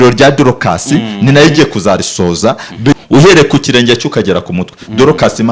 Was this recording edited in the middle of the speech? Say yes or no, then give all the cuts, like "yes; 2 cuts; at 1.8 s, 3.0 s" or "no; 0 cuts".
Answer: yes; 1 cut; at 3.0 s